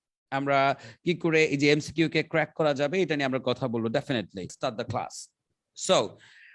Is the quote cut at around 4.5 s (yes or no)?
yes